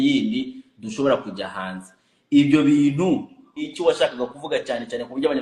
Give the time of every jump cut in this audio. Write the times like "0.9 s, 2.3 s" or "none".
3.7 s